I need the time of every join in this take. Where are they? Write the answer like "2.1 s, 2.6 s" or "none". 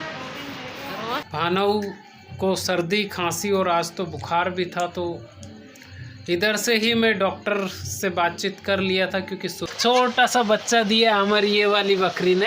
1.2 s, 9.7 s

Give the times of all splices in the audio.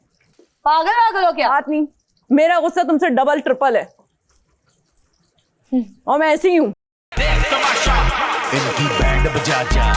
7.0 s

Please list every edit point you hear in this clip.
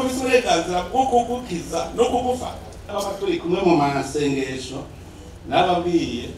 2.9 s

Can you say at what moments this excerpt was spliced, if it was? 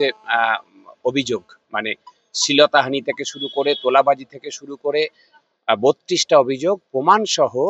none

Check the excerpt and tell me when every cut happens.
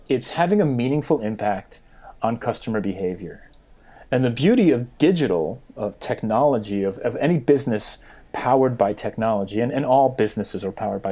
none

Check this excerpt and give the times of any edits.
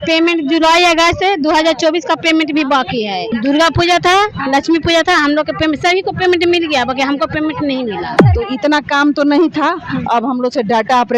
3.3 s, 8.2 s

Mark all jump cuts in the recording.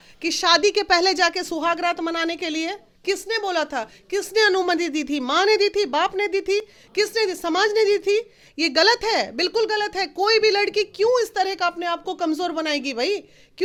none

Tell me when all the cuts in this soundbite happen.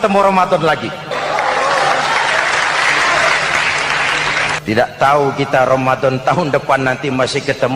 1.1 s, 4.6 s

